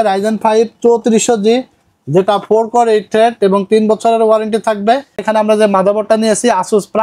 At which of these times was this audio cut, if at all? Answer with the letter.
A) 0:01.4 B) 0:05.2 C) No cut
B